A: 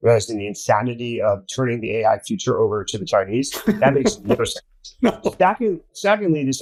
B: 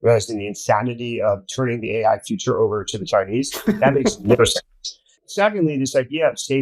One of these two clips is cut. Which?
B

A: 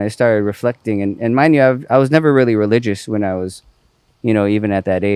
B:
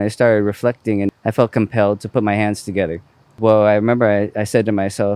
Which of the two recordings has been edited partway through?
B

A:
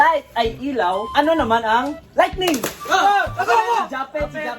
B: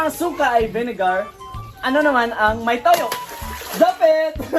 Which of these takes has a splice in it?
A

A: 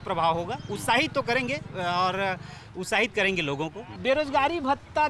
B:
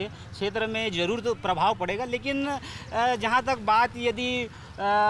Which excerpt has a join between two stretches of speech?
A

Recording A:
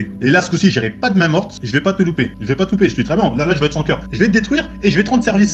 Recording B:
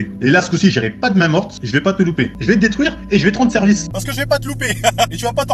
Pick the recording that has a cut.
B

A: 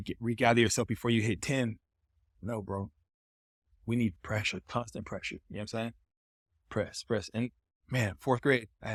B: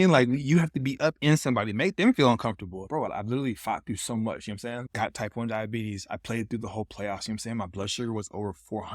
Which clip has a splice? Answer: B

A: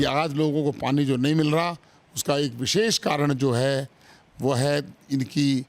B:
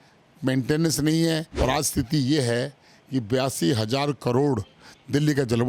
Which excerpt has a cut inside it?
B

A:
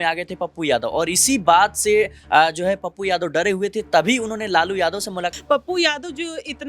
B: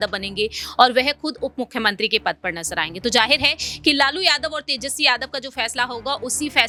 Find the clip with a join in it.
A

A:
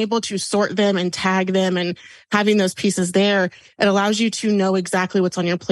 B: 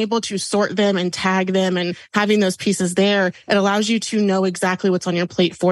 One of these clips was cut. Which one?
B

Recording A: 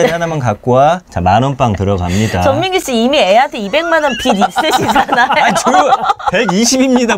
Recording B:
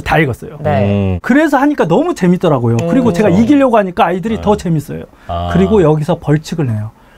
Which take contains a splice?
B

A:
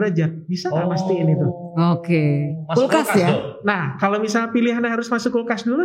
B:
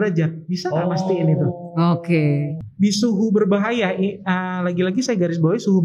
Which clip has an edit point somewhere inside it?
B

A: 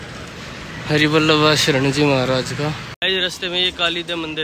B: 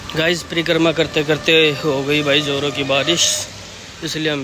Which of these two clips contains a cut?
A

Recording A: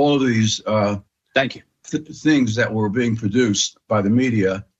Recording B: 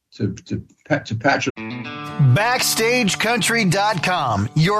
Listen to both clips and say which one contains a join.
B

